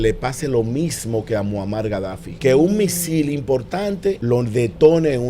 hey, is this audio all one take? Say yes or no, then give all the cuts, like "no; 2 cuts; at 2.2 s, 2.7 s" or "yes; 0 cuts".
no; 2 cuts; at 2.2 s, 4.2 s